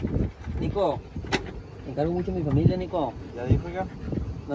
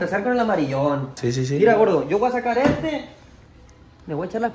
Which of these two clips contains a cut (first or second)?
second